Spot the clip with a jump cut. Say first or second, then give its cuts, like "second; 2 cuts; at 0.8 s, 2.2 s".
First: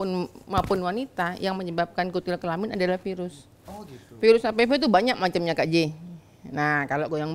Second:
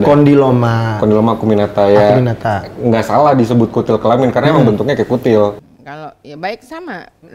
second; 1 cut; at 5.5 s